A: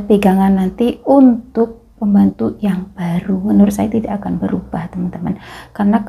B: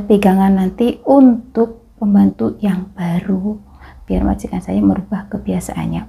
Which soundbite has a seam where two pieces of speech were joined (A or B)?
A